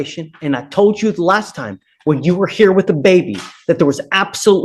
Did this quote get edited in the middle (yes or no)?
no